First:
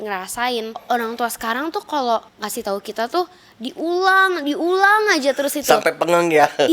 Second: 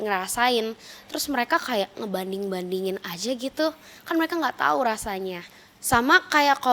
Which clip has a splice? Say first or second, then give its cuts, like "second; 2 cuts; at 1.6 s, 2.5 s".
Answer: first; 2 cuts; at 0.8 s, 2.4 s